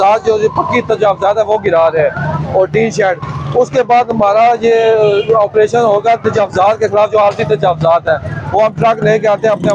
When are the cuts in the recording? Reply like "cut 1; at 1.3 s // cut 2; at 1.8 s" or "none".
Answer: none